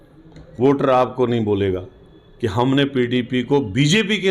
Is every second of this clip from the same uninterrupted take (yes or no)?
yes